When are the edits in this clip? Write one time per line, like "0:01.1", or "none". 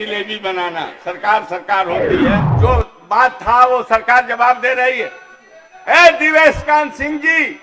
0:02.5